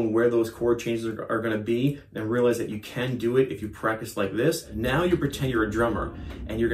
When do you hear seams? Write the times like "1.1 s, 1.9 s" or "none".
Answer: 4.7 s

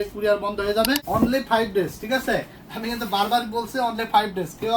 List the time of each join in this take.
1.0 s

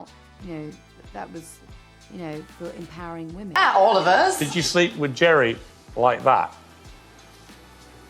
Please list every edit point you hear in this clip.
3.6 s

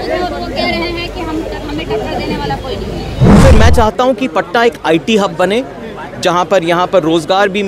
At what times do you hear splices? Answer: 3.4 s

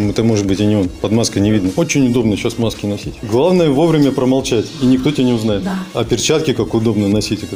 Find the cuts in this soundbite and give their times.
1.0 s, 1.7 s, 3.1 s, 5.9 s

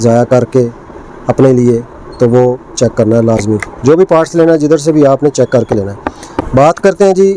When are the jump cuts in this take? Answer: none

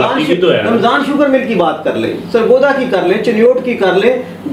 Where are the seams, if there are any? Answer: none

